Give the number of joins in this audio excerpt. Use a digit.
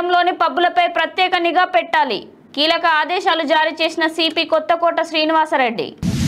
0